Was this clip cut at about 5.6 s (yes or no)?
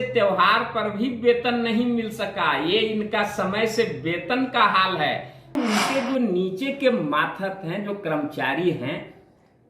yes